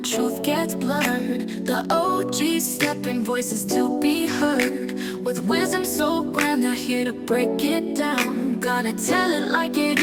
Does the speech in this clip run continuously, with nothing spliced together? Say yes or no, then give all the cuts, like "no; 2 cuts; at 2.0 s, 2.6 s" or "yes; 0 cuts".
yes; 0 cuts